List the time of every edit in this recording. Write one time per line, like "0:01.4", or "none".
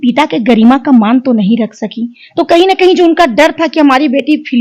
none